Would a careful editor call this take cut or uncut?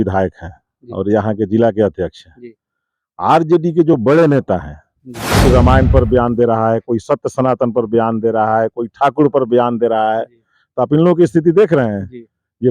cut